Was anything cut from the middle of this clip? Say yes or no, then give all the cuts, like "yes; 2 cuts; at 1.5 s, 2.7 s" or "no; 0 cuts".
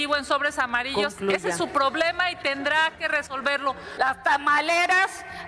yes; 1 cut; at 3.8 s